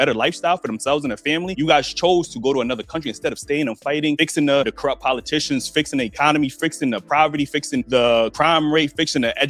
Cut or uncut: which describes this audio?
uncut